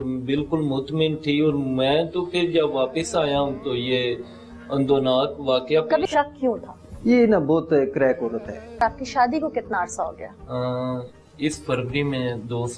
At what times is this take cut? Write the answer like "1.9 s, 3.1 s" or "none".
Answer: 6.1 s, 8.8 s